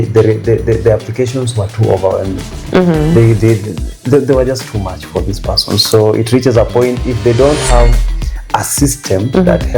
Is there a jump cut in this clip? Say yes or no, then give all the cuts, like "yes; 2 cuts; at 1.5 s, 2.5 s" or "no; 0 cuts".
no; 0 cuts